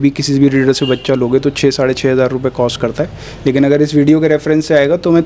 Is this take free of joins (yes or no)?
yes